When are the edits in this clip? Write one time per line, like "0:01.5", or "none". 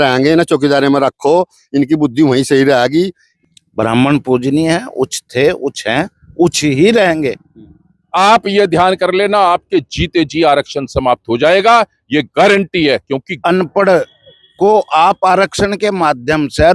0:03.1
0:08.0
0:13.3